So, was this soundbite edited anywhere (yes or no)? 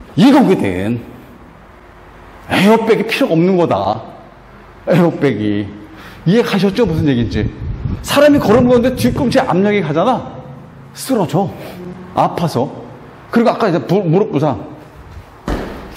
no